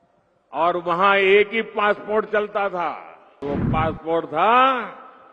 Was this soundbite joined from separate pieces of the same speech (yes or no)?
yes